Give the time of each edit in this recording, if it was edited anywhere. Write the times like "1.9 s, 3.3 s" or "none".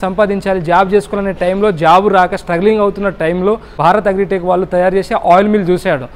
3.7 s